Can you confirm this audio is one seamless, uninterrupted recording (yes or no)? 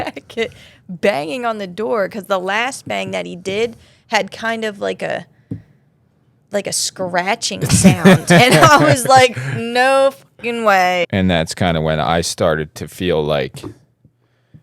no